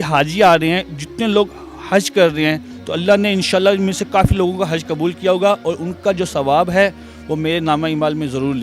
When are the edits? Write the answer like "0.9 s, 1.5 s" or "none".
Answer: none